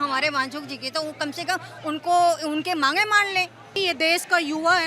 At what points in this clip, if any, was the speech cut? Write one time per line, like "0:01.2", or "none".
0:03.8